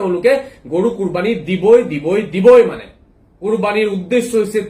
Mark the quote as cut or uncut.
cut